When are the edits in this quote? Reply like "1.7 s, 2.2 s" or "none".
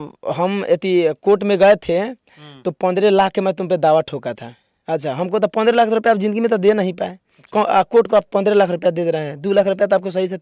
none